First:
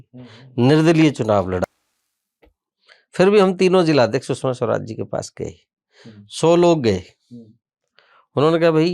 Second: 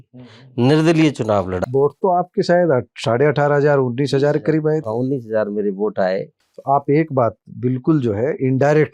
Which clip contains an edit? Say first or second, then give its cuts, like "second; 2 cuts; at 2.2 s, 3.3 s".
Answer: first; 1 cut; at 1.7 s